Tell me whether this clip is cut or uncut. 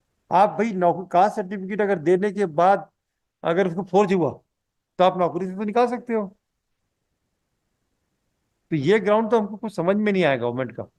uncut